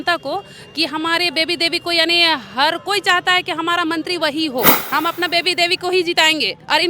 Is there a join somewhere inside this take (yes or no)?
yes